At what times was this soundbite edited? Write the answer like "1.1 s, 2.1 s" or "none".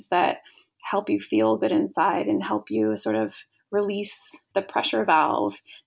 4.4 s